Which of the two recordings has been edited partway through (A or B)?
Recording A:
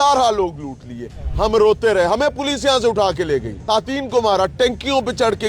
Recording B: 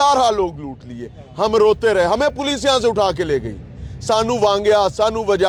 A